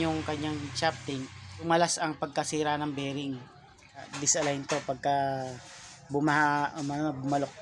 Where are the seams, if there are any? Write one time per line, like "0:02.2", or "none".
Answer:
0:01.7
0:04.1